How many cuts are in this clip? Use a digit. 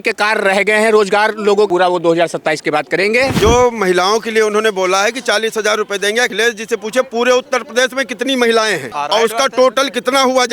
4